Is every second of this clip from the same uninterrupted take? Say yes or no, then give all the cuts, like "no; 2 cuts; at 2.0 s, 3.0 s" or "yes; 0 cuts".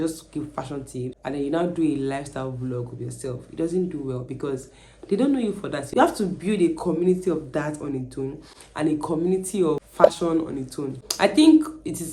no; 4 cuts; at 1.2 s, 5.8 s, 9.9 s, 10.9 s